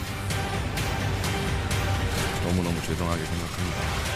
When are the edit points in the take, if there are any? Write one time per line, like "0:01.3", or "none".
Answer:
0:01.3

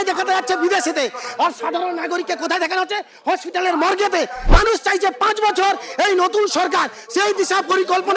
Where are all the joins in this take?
0:04.4

